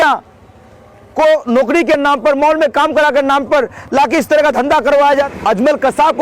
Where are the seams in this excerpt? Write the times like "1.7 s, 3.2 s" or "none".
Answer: 5.3 s